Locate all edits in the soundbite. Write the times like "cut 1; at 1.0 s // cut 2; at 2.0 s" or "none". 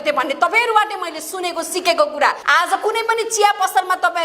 cut 1; at 2.4 s